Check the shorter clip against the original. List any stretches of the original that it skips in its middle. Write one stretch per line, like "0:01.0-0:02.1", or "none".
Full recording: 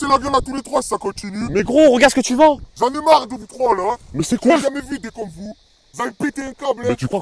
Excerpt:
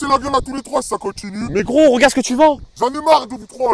none